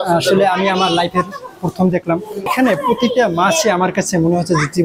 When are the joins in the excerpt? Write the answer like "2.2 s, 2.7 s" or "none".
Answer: 2.5 s